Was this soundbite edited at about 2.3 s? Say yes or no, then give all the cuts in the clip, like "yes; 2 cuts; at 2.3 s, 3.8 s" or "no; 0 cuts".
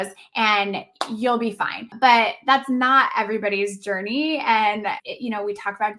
no; 0 cuts